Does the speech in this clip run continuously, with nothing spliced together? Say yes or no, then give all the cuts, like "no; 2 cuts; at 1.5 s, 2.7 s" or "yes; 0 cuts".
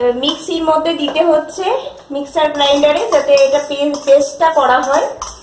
yes; 0 cuts